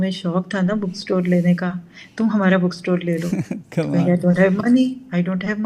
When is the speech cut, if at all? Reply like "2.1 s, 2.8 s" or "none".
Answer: none